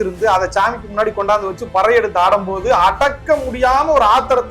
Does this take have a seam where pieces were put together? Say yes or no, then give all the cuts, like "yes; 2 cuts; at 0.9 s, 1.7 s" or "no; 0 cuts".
no; 0 cuts